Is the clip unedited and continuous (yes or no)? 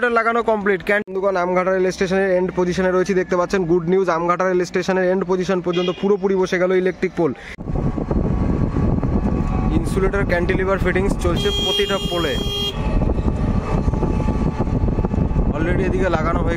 no